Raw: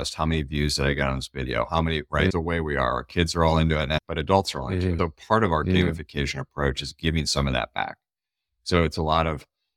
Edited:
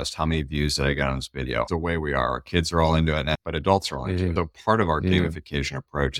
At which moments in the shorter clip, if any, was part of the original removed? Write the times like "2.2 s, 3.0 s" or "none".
1.7 s

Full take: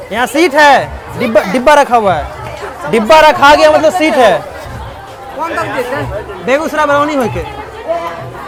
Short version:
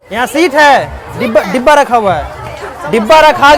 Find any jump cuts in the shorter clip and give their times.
none

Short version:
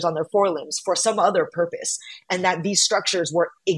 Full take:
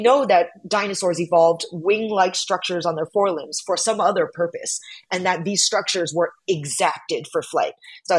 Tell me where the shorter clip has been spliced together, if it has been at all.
none

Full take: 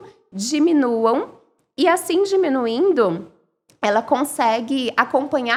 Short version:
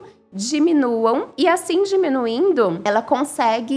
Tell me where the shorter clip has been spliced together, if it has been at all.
1.3 s, 2.8 s

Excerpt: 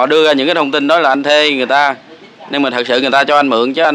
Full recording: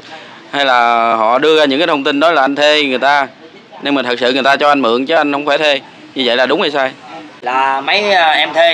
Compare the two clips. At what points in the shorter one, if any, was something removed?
none

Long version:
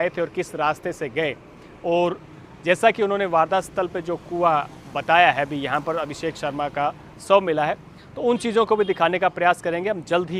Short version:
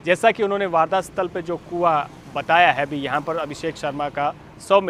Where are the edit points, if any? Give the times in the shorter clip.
none

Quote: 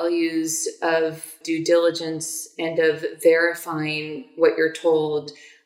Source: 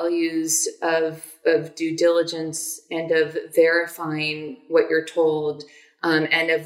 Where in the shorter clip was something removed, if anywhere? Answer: 1.4 s

